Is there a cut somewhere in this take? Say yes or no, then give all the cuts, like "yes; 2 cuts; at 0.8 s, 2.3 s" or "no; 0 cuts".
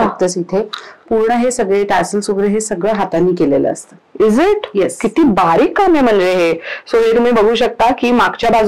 no; 0 cuts